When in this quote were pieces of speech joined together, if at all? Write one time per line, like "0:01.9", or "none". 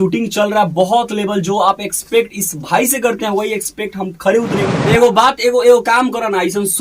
0:04.7